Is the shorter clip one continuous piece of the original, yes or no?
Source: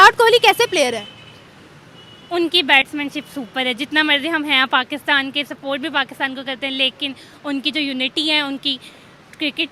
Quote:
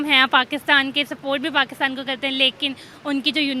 yes